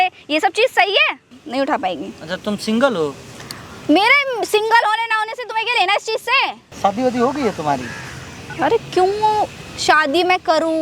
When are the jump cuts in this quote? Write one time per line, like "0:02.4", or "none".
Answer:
0:01.4
0:06.6